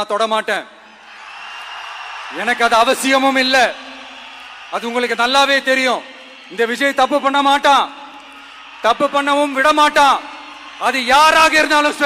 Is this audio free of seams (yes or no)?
yes